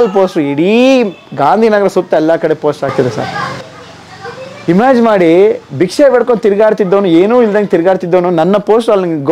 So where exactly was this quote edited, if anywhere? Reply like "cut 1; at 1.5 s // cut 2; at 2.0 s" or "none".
none